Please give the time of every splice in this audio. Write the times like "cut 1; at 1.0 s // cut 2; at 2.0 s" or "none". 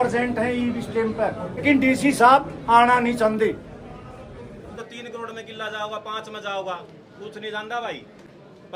cut 1; at 1.6 s // cut 2; at 4.8 s